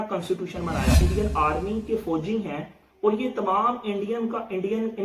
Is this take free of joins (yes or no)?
no